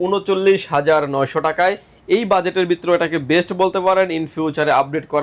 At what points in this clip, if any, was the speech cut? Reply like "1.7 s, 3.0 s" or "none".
none

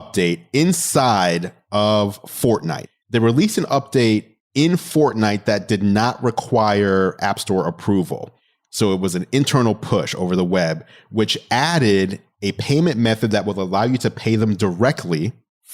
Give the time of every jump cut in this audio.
2.8 s, 4.4 s

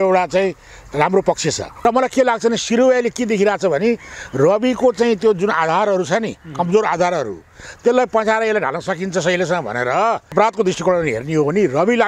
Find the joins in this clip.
1.7 s, 10.3 s

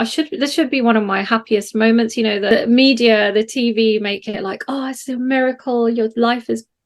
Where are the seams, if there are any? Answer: 2.5 s

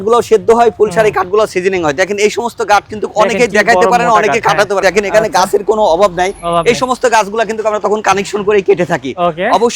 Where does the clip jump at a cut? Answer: 4.8 s

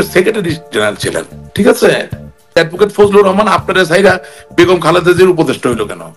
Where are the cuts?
2.5 s

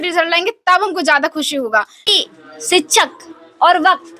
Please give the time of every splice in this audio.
2.1 s

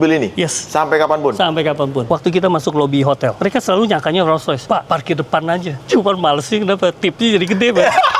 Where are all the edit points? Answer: 2.1 s, 3.4 s, 5.8 s

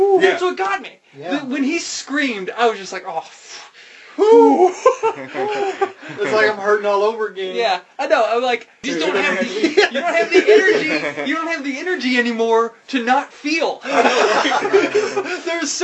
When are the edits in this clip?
8.8 s

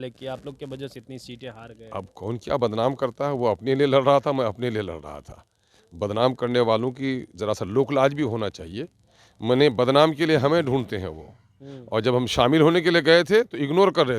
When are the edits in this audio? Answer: none

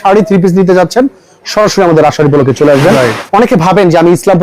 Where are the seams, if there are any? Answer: 3.2 s

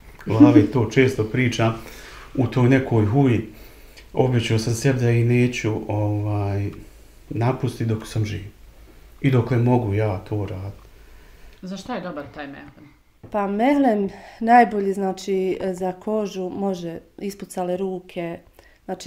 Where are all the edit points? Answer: 11.5 s

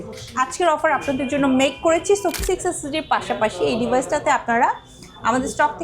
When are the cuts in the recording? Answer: 2.4 s

